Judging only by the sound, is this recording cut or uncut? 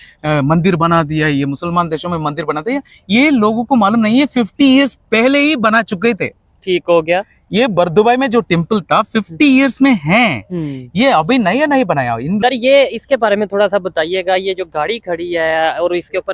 cut